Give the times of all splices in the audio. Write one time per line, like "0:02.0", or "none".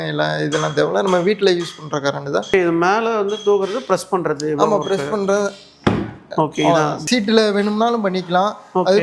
0:02.5
0:07.0